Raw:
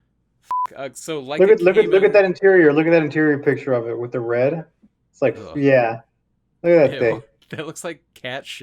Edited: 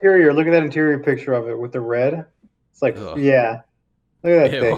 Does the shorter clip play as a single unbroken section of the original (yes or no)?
yes